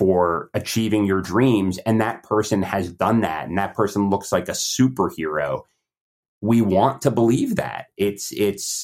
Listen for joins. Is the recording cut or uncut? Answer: uncut